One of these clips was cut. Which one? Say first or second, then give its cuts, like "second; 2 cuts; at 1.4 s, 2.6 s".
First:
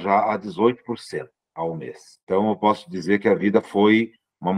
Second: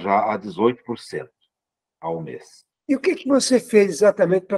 first; 2 cuts; at 1.4 s, 2.1 s